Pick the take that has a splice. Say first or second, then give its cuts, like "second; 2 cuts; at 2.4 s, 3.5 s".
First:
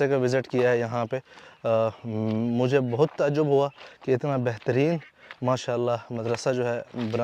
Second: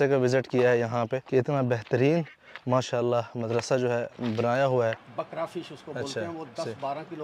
second; 2 cuts; at 1.2 s, 5.1 s